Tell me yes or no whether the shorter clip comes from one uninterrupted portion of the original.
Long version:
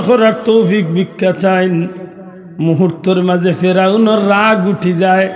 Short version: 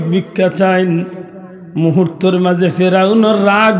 yes